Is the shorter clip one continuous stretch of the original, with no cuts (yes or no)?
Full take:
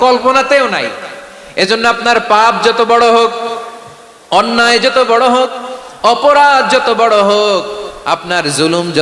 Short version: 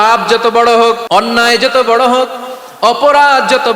no